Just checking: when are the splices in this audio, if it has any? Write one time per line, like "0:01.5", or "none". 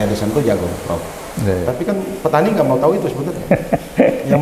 0:01.6